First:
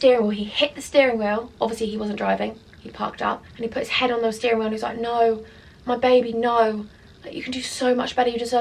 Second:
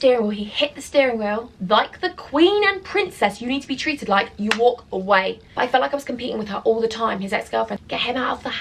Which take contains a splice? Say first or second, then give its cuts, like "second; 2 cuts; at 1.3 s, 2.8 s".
second; 3 cuts; at 1.5 s, 5.4 s, 7.8 s